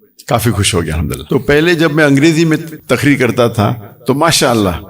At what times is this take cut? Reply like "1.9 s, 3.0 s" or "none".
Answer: 1.2 s, 2.7 s